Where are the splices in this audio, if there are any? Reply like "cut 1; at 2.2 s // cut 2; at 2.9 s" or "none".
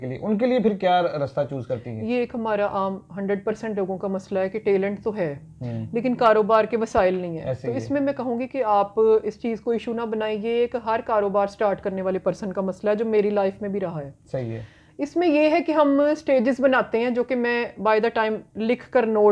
none